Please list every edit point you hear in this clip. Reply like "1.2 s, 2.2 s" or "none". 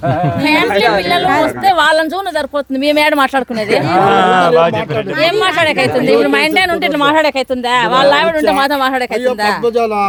none